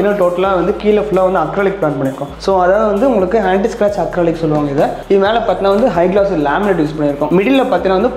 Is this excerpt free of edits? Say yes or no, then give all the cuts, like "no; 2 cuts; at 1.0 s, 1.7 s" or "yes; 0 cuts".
yes; 0 cuts